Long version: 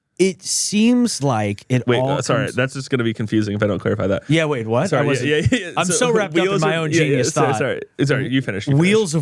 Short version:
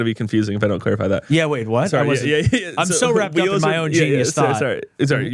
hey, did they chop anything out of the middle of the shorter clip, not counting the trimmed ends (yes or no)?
no